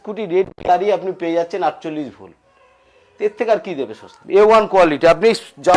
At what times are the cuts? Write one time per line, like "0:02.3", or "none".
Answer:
0:04.1